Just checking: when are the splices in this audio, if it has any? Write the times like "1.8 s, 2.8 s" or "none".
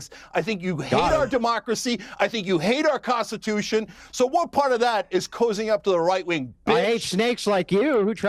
none

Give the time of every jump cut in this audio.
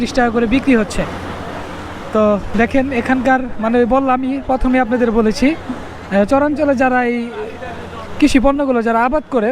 none

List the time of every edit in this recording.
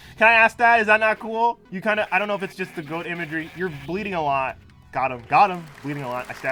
none

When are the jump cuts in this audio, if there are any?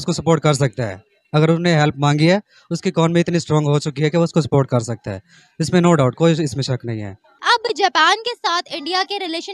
none

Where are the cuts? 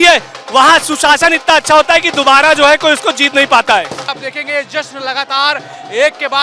4.1 s

